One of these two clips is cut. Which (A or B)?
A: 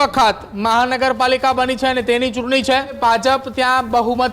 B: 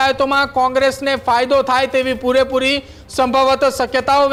A